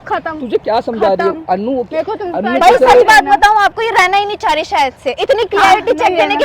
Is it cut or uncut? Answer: uncut